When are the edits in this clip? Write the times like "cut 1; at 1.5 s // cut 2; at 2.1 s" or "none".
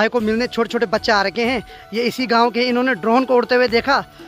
none